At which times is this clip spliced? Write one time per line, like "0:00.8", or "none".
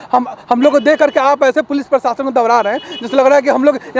none